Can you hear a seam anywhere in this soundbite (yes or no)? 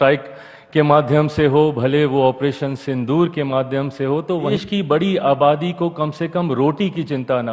yes